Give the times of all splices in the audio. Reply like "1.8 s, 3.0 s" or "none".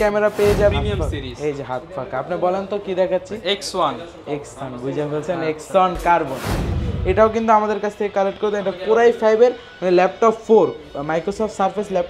0.7 s, 6.8 s